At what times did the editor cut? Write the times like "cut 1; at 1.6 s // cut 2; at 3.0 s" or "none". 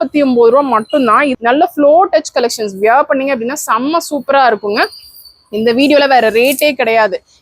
cut 1; at 1.3 s

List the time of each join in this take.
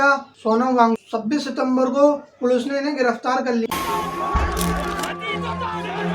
cut 1; at 1.1 s // cut 2; at 3.7 s

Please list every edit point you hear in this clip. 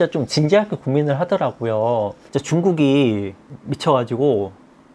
cut 1; at 2.2 s

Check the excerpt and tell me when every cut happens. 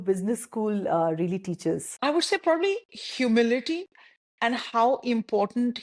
cut 1; at 1.9 s

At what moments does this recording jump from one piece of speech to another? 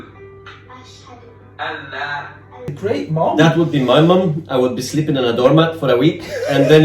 cut 1; at 2.6 s

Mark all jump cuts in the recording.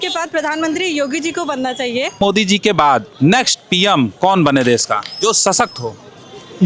cut 1; at 2.2 s

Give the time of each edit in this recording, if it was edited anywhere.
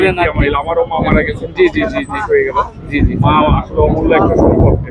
none

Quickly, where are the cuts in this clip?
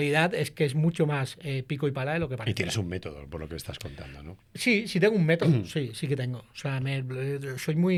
none

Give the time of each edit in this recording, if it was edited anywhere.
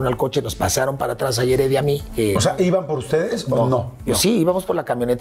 cut 1; at 2.1 s // cut 2; at 4.1 s

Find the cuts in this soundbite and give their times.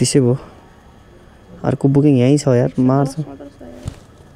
none

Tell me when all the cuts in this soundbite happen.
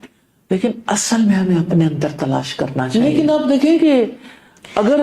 cut 1; at 2.9 s

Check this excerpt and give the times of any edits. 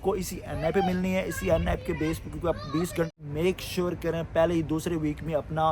cut 1; at 3.2 s

